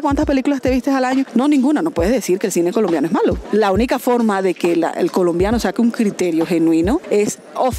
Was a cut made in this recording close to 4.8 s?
no; 3 cuts; at 1.3 s, 3.4 s, 7.0 s

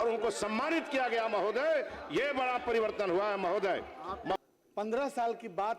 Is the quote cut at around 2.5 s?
no; 1 cut; at 4.4 s

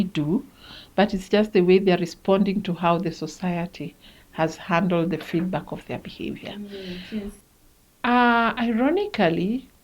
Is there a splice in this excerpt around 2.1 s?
no; 1 cut; at 7.4 s

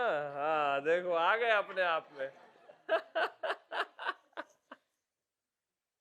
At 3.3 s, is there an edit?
no; 0 cuts

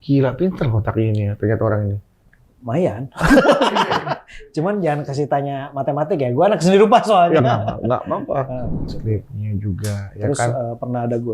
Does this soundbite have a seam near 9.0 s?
yes; 1 cut; at 9.0 s

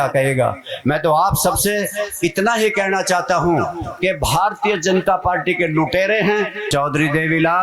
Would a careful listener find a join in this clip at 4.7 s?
no; 1 cut; at 6.6 s

